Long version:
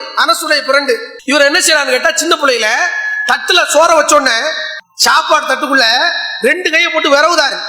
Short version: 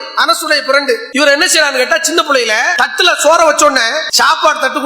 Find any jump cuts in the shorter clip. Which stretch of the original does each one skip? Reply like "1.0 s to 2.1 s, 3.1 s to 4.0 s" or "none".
1.1 s to 1.2 s, 2.8 s to 3.2 s, 4.5 s to 4.9 s